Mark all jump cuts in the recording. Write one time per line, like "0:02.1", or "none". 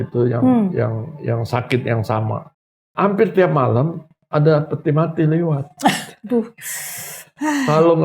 0:02.5